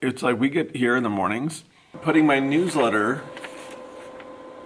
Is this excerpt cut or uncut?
cut